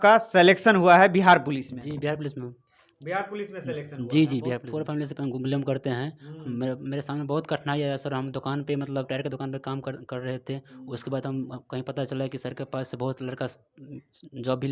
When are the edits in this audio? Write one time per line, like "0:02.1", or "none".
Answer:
0:04.7